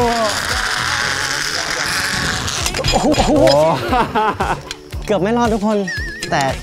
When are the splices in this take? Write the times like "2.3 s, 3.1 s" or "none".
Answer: none